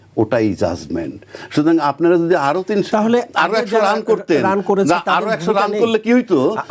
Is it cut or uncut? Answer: uncut